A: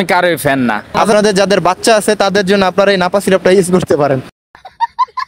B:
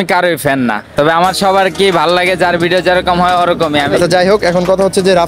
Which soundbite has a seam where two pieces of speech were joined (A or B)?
A